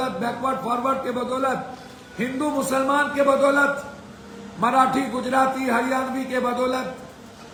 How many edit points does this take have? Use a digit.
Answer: 0